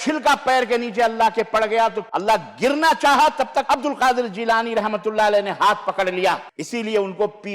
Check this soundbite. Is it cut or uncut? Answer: cut